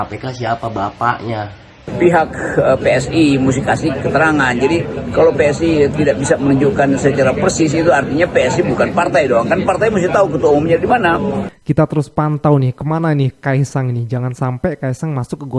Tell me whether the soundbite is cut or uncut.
cut